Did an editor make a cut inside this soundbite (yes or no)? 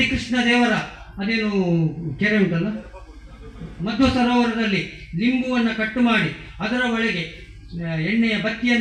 no